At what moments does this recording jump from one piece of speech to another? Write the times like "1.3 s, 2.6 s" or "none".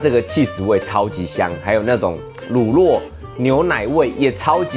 none